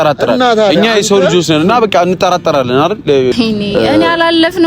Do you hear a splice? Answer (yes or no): yes